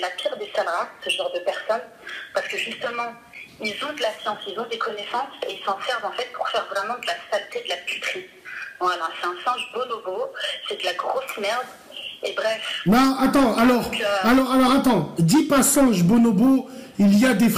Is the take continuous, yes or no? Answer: yes